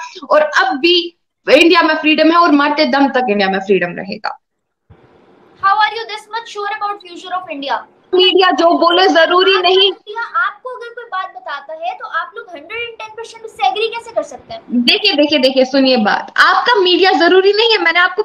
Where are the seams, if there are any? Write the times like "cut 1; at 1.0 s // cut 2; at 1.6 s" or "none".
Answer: cut 1; at 8.1 s